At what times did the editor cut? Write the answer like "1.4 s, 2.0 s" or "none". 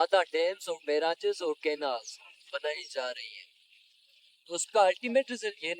none